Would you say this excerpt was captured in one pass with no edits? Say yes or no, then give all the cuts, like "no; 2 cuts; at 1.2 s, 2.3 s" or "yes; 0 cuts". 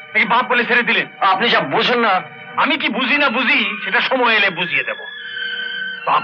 yes; 0 cuts